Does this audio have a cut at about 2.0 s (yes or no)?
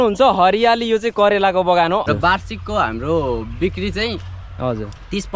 yes